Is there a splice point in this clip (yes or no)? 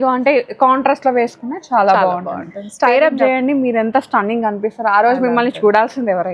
no